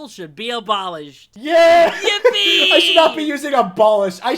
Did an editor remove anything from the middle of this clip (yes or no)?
yes